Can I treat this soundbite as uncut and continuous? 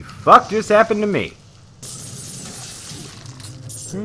no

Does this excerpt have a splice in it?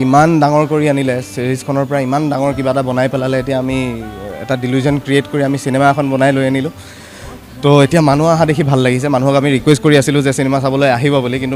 no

